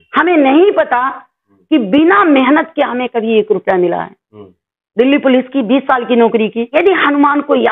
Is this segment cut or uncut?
cut